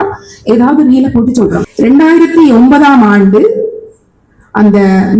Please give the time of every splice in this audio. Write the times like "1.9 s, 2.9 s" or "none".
1.6 s